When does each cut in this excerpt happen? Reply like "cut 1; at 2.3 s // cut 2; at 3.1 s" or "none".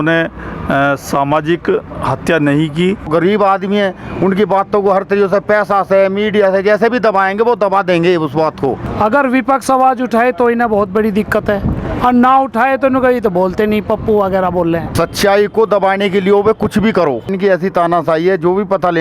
cut 1; at 3.1 s // cut 2; at 8.9 s // cut 3; at 14.9 s // cut 4; at 17.3 s